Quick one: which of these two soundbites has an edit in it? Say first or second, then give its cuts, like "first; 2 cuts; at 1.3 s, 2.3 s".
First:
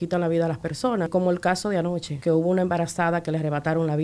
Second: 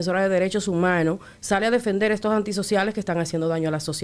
first; 2 cuts; at 1.1 s, 2.1 s